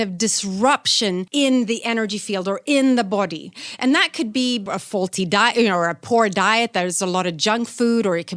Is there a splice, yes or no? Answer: yes